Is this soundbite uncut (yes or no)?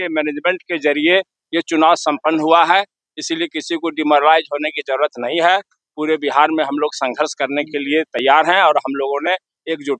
yes